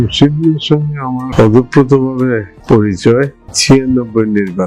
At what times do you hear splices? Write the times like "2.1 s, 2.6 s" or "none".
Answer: 1.3 s, 2.5 s, 3.5 s